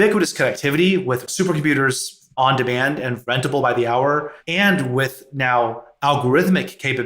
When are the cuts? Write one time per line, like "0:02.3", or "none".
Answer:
0:01.3